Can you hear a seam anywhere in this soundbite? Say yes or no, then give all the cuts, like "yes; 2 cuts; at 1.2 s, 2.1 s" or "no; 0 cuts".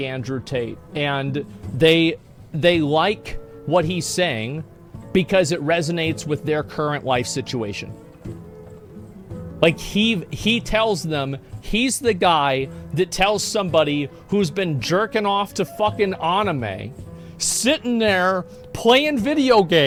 no; 0 cuts